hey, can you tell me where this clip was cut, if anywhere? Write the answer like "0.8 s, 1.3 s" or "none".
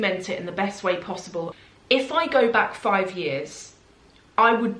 1.5 s